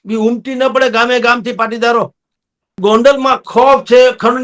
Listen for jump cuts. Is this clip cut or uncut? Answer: cut